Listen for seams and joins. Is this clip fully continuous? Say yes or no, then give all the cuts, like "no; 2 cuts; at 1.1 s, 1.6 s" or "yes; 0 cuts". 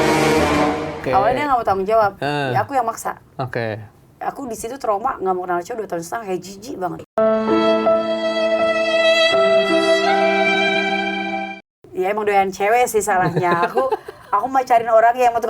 no; 2 cuts; at 1.0 s, 11.7 s